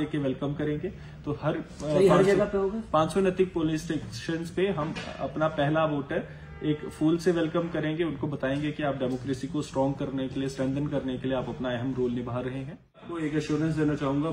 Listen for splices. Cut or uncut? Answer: cut